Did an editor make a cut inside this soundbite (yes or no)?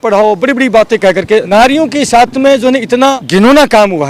yes